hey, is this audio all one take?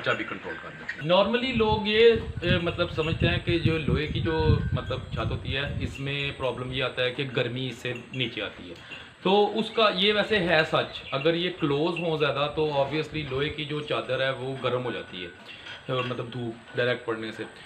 no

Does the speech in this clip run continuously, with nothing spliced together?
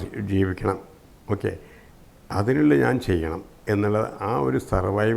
yes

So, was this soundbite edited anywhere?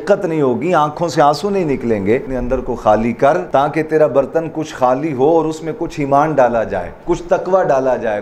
yes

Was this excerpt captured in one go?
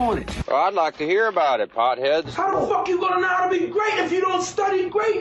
yes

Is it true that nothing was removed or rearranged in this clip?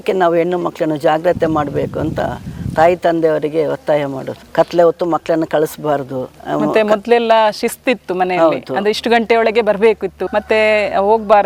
yes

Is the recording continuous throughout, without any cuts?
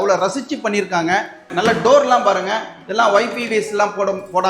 no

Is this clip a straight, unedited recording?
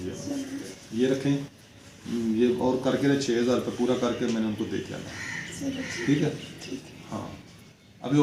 yes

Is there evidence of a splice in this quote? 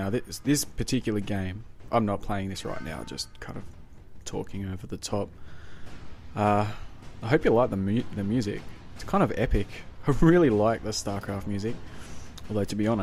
no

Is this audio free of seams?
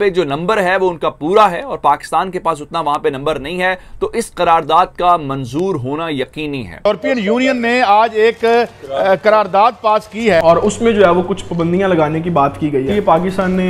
no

